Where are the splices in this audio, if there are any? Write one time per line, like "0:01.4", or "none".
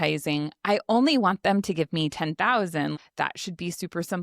0:03.0